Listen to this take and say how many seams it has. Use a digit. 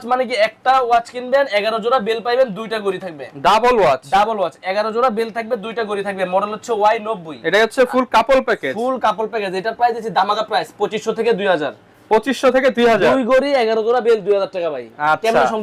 0